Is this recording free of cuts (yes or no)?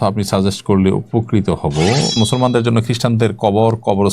no